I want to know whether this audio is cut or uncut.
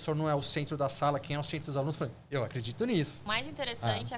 cut